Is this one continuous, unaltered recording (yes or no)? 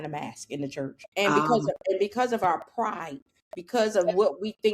no